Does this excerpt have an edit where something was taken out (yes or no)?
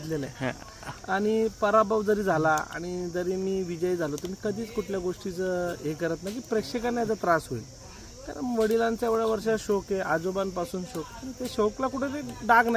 no